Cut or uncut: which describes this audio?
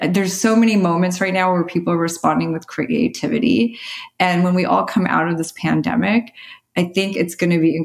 uncut